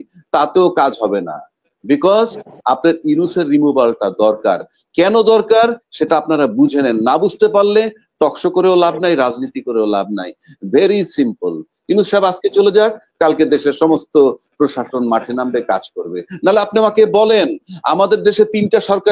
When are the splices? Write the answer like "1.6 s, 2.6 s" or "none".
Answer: none